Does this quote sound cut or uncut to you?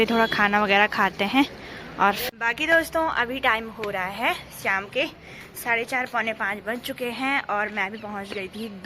cut